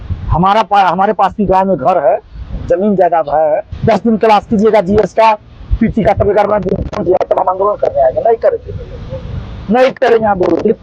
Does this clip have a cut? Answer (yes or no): yes